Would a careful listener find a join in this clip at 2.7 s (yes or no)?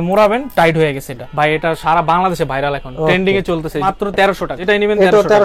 no